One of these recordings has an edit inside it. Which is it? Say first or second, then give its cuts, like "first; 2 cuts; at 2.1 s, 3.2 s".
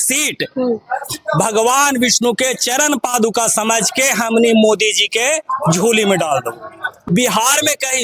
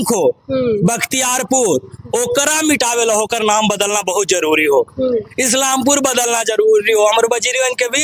first; 1 cut; at 6.9 s